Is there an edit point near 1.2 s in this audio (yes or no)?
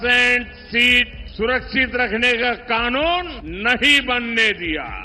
yes